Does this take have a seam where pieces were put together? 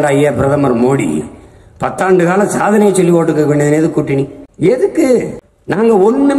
no; 0 cuts

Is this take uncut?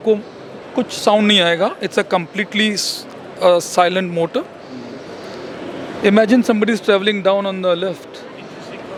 yes; 0 cuts

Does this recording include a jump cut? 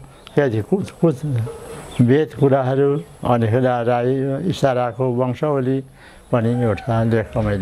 no; 0 cuts

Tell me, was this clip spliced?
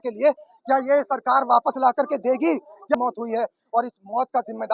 yes; 1 cut; at 3.0 s

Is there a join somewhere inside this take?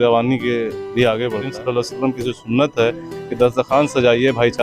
yes; 1 cut; at 1.5 s

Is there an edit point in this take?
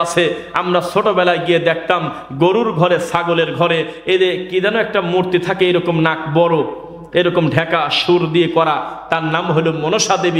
no; 0 cuts

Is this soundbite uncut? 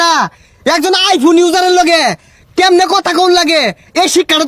yes; 0 cuts

